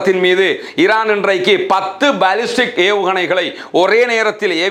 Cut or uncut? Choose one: uncut